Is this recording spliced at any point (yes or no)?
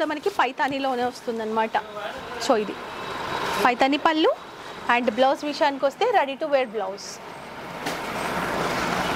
no